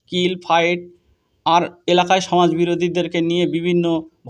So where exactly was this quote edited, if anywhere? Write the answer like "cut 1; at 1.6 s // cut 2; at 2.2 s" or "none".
none